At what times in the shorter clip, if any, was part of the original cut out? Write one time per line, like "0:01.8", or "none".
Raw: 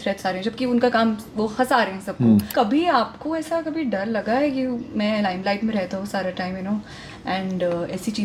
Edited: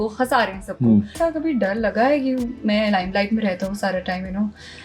0:01.1